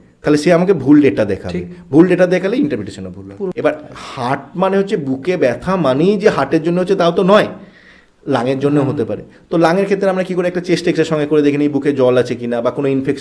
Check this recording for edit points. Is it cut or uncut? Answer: cut